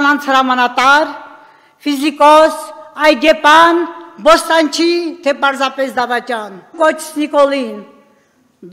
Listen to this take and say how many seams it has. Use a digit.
1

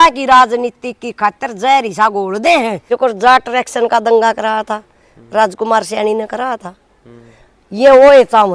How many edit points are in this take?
1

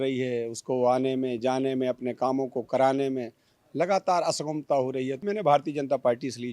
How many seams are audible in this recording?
1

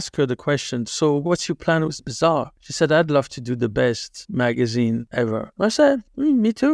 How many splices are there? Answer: 2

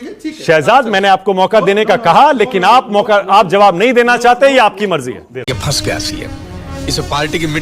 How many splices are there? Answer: 1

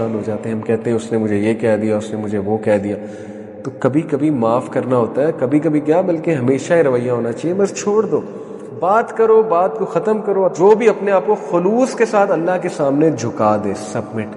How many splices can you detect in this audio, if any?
1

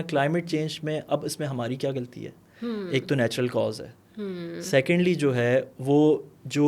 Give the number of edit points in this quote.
0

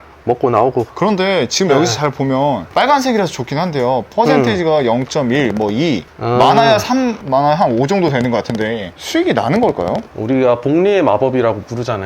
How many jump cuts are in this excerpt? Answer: 3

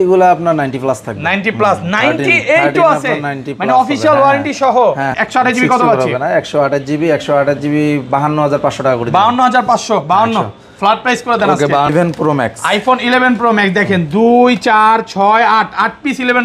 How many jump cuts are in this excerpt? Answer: 2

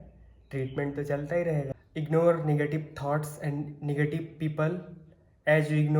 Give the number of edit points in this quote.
1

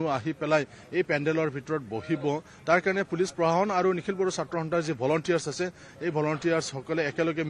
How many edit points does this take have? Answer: 1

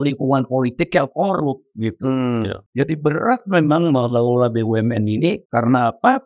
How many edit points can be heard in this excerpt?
2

